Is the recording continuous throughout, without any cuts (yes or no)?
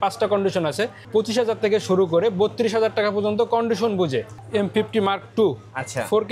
no